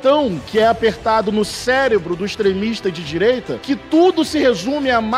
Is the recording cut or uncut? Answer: uncut